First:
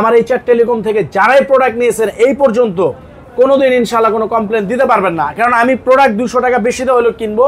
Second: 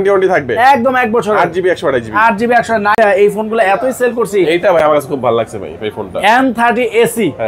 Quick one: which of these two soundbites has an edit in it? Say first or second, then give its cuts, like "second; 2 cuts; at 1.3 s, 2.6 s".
second; 1 cut; at 3.0 s